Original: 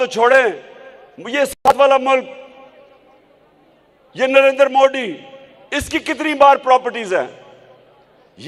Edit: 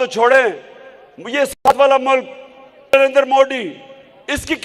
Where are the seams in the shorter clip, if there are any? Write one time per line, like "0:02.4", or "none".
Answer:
0:02.9